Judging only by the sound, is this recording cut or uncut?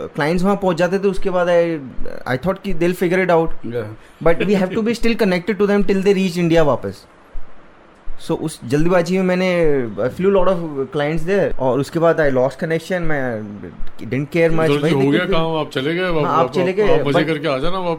uncut